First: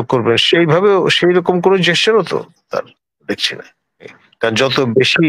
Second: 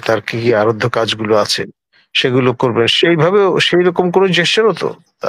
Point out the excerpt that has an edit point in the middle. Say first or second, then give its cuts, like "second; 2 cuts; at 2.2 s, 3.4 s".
first; 1 cut; at 4.2 s